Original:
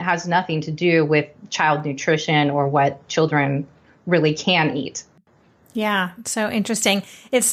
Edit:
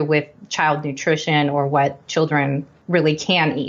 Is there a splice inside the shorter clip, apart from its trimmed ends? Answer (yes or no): yes